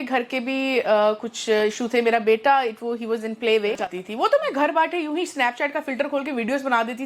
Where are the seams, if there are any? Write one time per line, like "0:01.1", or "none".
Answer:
0:03.9

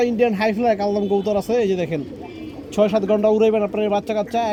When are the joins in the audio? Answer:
none

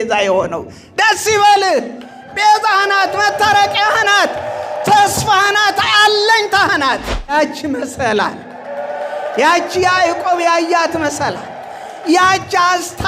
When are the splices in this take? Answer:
0:07.3

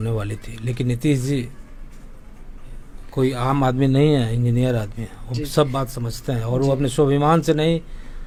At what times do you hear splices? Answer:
none

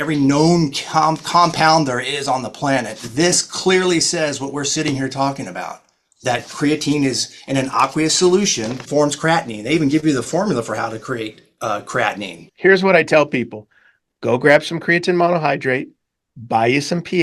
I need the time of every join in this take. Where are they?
0:08.8
0:12.5

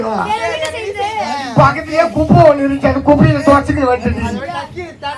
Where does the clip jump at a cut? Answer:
none

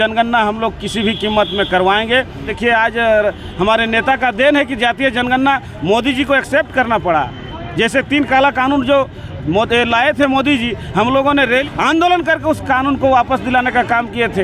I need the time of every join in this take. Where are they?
0:02.5
0:11.6

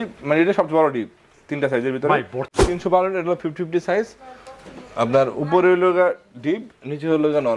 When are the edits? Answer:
0:02.4

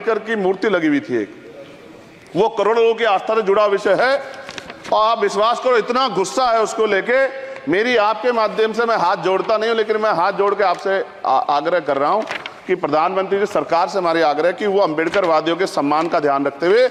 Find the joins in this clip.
none

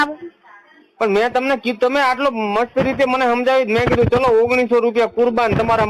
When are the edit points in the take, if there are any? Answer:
none

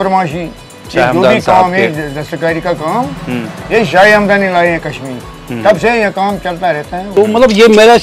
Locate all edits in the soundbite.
0:07.1

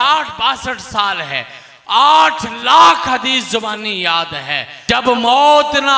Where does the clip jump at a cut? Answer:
0:04.7

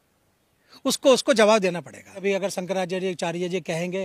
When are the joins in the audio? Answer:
0:02.2

